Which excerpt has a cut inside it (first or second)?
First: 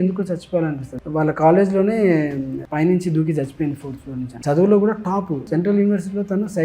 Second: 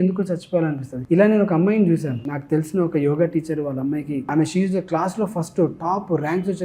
first